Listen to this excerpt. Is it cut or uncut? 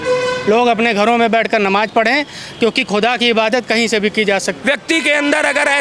cut